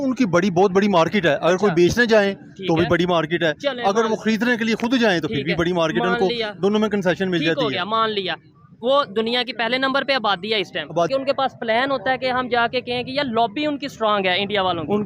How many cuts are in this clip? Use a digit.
1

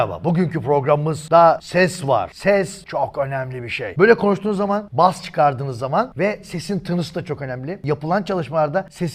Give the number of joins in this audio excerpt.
0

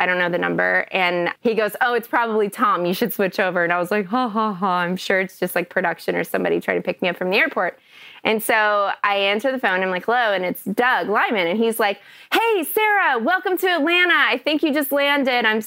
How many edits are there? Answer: 2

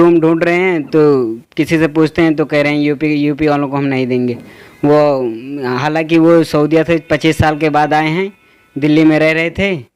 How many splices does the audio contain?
0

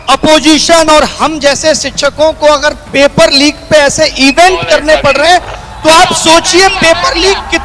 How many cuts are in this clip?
0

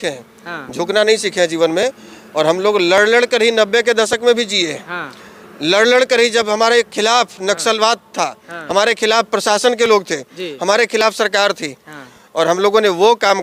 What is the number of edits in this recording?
0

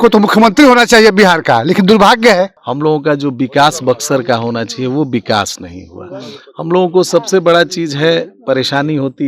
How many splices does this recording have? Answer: 1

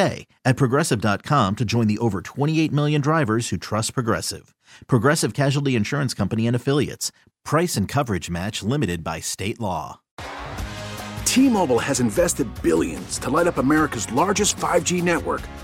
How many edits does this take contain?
1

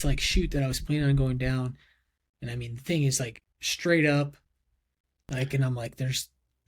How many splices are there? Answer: 0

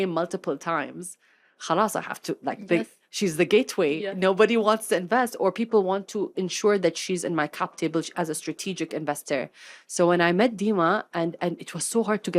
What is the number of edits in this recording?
0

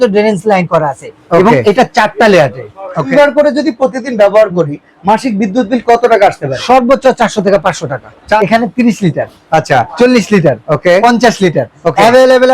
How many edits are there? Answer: 2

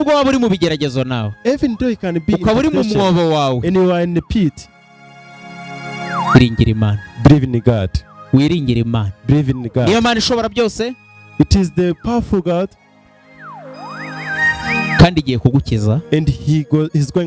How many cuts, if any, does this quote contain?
0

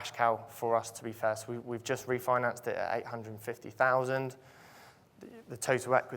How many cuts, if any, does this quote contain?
0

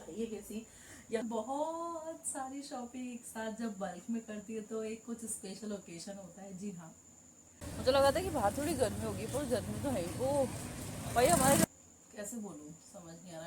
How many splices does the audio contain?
3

